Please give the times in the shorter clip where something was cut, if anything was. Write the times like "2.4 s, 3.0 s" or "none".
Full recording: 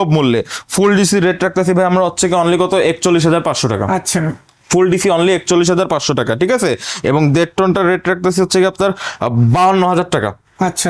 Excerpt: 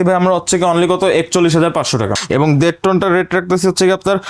2.1 s